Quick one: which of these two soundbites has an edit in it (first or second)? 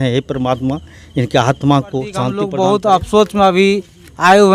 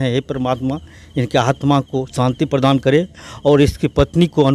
first